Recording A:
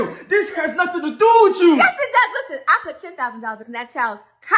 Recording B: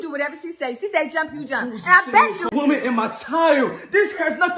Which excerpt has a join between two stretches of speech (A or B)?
B